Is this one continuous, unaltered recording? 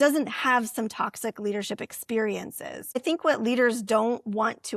no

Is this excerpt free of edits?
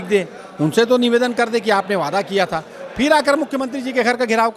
yes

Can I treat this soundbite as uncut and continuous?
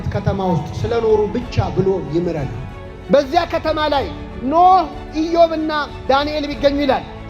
no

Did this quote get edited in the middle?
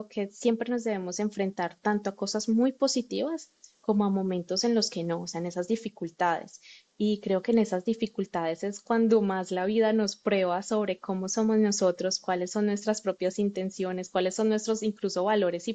no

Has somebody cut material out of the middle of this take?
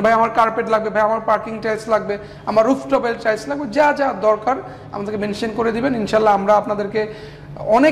no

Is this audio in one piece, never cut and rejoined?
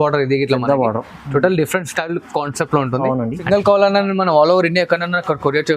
no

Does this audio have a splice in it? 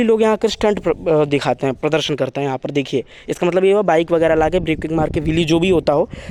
no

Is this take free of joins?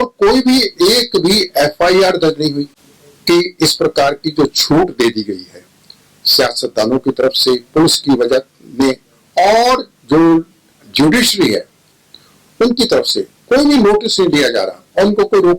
yes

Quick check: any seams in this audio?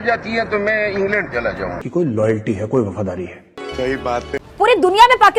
no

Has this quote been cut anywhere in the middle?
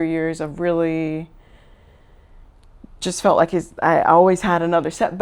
no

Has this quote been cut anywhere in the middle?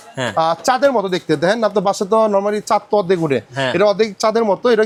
no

